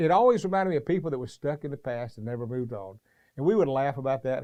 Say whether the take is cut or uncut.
uncut